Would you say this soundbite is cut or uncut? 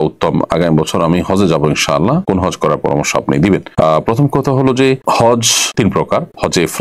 uncut